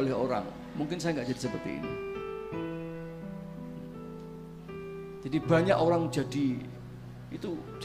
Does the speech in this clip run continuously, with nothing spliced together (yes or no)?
yes